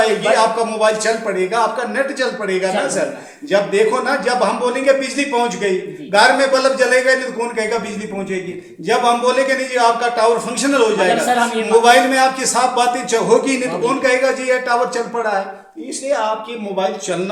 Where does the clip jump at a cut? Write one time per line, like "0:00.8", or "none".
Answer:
none